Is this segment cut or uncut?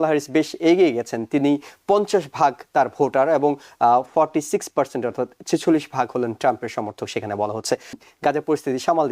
cut